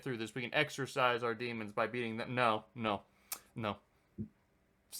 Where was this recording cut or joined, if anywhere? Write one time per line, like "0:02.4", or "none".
none